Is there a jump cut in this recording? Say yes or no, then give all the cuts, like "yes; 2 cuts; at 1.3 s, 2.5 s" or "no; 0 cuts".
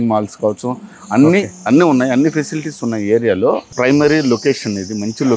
yes; 1 cut; at 3.7 s